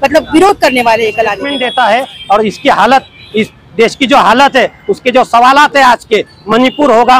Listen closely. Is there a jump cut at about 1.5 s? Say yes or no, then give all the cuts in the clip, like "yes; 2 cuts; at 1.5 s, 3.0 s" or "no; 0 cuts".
yes; 1 cut; at 1.5 s